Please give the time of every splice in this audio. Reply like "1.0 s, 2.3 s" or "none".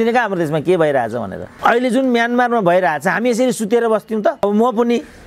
1.4 s, 4.4 s